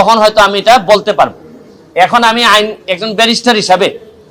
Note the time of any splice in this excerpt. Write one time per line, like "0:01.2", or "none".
none